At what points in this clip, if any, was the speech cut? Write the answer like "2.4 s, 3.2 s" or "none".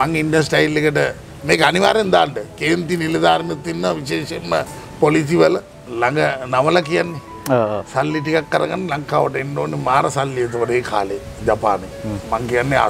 5.8 s